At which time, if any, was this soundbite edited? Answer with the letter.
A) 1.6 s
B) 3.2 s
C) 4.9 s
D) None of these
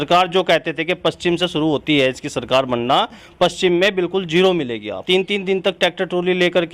C